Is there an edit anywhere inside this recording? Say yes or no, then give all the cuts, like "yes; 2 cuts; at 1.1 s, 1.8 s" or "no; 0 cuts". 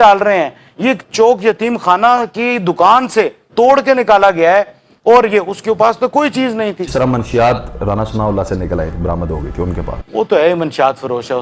no; 0 cuts